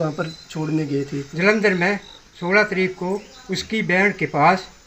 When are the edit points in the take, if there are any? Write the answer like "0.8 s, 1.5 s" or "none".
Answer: 1.2 s